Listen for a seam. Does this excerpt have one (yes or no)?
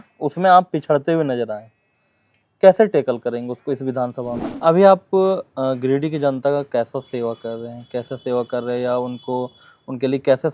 yes